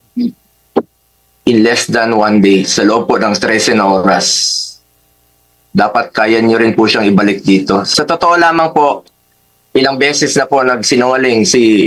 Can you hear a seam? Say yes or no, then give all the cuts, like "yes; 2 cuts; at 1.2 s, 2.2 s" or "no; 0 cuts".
yes; 1 cut; at 7.9 s